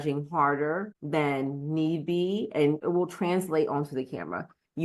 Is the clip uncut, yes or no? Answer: no